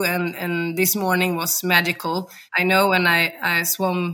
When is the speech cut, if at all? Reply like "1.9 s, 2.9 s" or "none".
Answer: 2.4 s